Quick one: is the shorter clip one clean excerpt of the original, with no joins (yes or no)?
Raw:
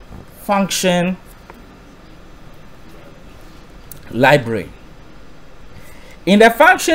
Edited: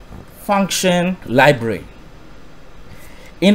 no